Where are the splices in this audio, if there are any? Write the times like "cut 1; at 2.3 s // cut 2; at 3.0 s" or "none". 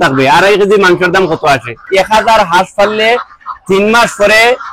cut 1; at 1.8 s